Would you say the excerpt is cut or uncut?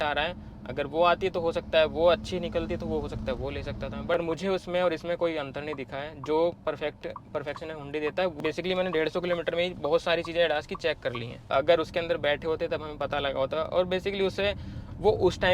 cut